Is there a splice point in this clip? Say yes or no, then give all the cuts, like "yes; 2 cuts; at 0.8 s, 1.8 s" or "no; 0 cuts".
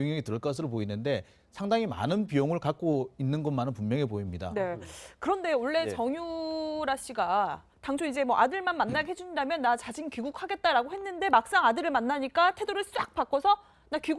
no; 0 cuts